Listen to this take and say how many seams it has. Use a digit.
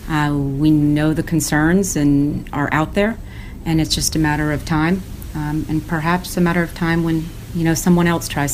1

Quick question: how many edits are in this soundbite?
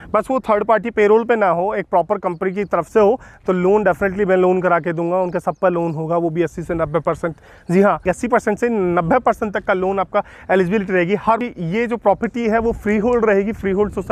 2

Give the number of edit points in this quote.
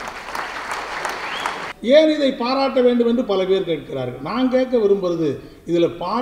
1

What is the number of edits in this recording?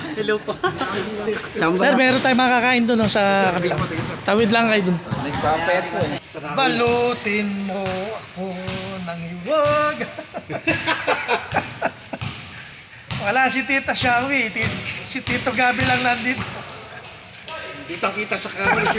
2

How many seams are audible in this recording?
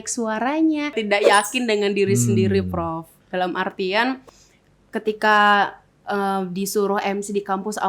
1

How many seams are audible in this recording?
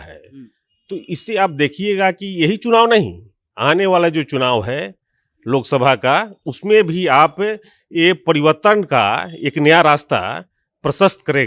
0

